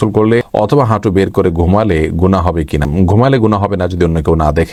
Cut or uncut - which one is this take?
uncut